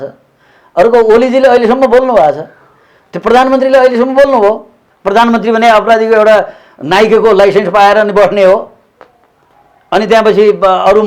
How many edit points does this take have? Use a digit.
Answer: 1